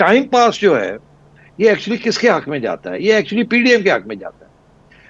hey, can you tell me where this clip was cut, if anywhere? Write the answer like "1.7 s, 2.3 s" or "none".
none